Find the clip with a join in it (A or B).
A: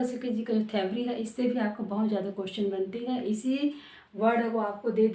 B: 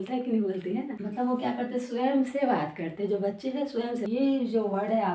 B